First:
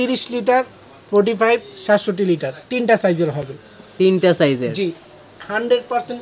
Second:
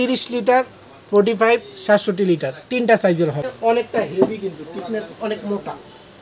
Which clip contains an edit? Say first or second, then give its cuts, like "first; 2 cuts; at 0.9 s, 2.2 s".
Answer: second; 1 cut; at 3.5 s